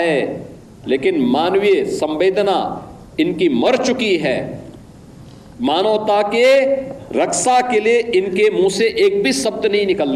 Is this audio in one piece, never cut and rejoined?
yes; 0 cuts

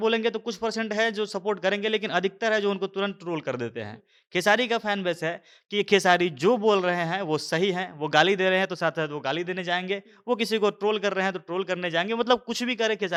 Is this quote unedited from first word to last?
yes; 0 cuts

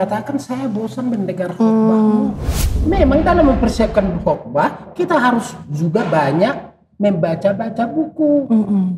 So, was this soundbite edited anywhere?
yes; 1 cut; at 2.7 s

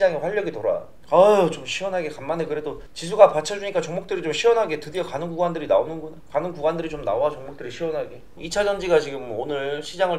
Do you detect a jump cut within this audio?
no; 0 cuts

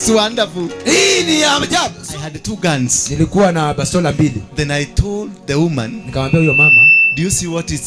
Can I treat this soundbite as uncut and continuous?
no; 1 cut; at 2.1 s

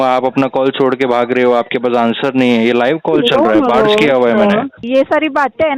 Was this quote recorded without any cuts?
no; 1 cut; at 4.8 s

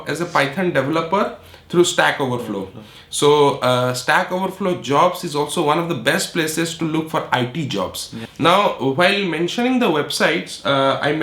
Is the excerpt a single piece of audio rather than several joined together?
no; 1 cut; at 8.2 s

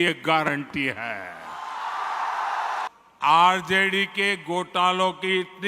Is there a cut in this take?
yes; 1 cut; at 2.9 s

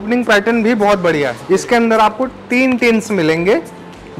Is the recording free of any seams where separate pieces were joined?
no; 1 cut; at 1.4 s

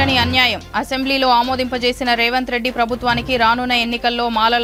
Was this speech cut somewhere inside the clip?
no; 0 cuts

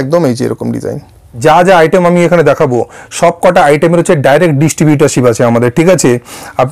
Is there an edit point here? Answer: yes; 1 cut; at 1.2 s

